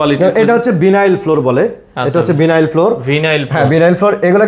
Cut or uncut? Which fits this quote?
uncut